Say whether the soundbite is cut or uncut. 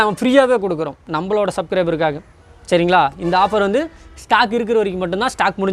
uncut